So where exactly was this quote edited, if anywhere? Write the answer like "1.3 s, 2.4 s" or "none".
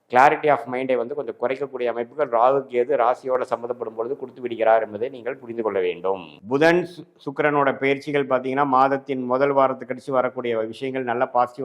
6.3 s